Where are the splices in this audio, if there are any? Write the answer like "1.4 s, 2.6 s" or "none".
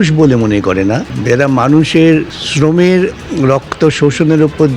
1.1 s, 2.4 s